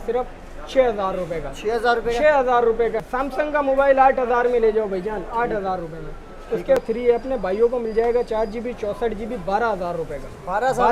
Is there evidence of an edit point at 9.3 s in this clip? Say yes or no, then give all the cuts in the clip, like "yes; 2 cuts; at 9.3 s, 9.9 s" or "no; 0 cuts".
no; 2 cuts; at 3.1 s, 6.7 s